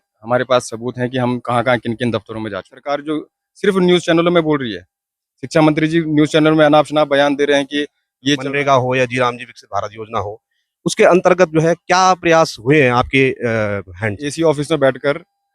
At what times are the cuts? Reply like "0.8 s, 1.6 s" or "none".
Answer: 2.9 s, 8.4 s, 14.3 s